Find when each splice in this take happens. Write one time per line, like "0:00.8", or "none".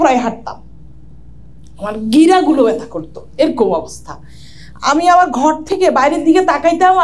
none